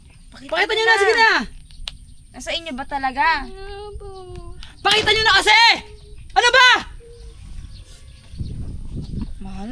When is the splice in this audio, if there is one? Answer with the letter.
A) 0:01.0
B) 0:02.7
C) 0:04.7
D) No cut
D